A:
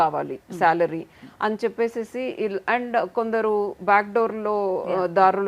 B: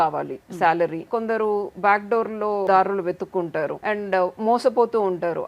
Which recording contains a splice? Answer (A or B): B